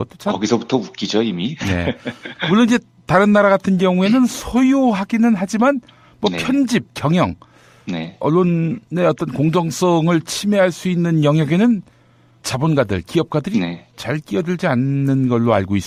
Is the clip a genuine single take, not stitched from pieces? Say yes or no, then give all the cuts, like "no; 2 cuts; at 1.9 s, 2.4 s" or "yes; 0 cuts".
yes; 0 cuts